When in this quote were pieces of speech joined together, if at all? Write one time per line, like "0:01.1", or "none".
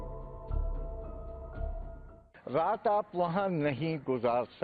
0:02.1